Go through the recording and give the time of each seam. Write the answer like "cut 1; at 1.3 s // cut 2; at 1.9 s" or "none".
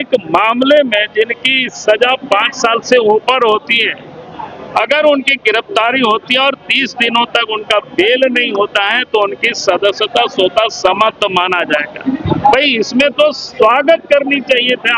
none